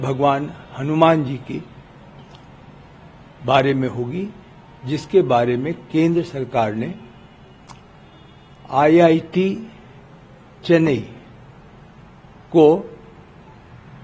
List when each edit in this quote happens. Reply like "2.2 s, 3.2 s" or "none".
none